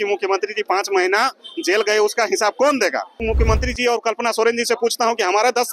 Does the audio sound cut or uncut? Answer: cut